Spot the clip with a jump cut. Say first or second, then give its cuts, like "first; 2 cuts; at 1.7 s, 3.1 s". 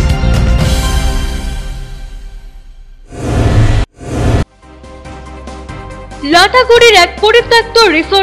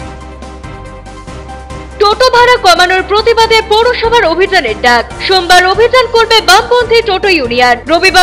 second; 1 cut; at 1.8 s